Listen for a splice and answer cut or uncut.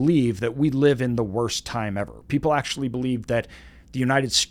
uncut